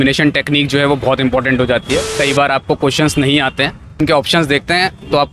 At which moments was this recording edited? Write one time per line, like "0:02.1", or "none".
0:04.0